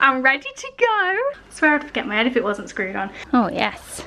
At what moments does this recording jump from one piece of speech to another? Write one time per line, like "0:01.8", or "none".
0:01.5
0:03.2